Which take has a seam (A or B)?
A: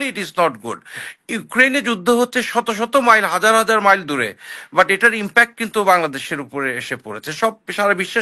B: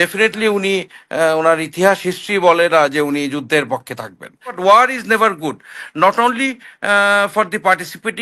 B